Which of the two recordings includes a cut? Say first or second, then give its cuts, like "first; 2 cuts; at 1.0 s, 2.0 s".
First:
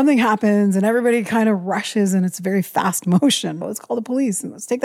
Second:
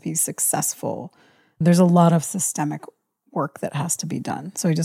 first; 1 cut; at 3.6 s